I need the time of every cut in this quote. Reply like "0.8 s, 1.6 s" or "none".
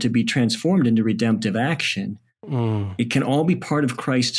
none